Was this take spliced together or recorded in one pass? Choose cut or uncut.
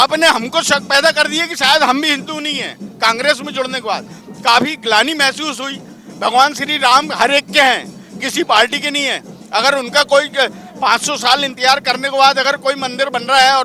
uncut